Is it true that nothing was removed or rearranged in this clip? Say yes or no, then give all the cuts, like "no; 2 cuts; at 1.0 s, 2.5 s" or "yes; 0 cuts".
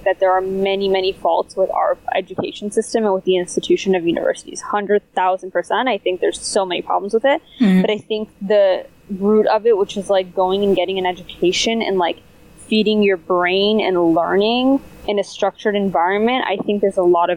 yes; 0 cuts